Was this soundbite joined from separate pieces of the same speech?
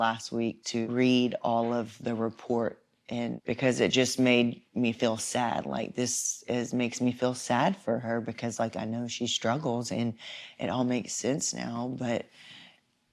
yes; 3 cuts; at 0.9 s, 1.9 s, 3.4 s

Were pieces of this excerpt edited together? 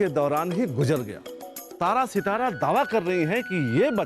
yes; 1 cut; at 1.7 s

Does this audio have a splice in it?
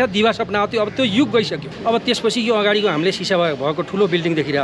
yes; 1 cut; at 1.7 s

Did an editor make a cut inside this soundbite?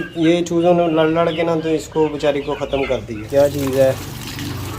yes; 1 cut; at 3.3 s

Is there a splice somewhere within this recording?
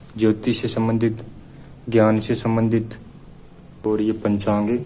yes; 1 cut; at 3.9 s

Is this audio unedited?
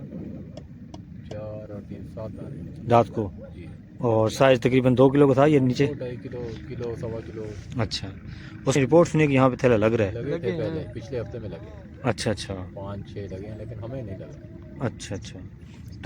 no; 1 cut; at 8.8 s

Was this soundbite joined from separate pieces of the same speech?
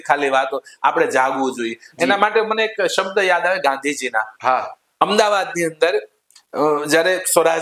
no; 0 cuts

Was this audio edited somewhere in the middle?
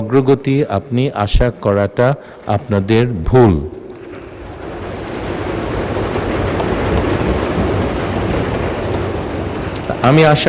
no; 0 cuts

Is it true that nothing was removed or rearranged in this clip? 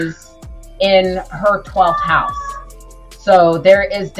yes; 0 cuts

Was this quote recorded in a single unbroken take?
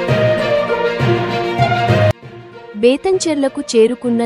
no; 1 cut; at 2.1 s

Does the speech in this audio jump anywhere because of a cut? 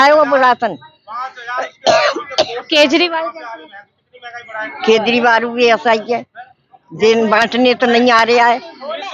no; 0 cuts

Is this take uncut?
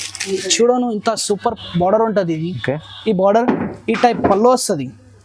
yes; 0 cuts

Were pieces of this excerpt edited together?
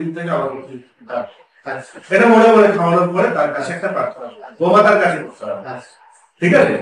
no; 0 cuts

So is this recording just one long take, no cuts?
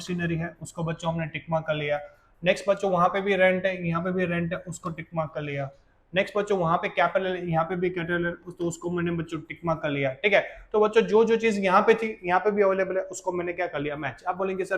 yes; 0 cuts

